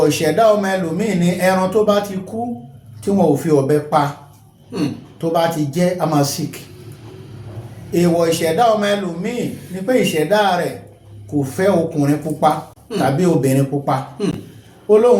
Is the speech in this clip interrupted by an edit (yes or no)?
no